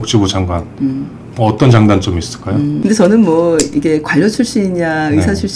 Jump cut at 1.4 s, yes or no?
no